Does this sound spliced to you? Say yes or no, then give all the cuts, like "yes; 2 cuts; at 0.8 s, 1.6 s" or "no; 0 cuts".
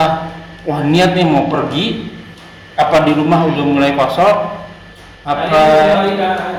no; 0 cuts